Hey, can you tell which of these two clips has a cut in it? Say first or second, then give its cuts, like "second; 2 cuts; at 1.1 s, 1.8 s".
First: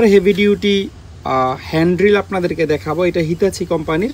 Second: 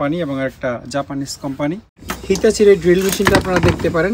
second; 1 cut; at 2.1 s